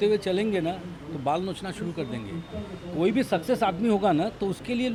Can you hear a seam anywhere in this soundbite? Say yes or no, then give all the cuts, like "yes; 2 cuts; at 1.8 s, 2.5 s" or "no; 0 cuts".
no; 0 cuts